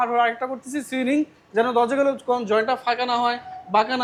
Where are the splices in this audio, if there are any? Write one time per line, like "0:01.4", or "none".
none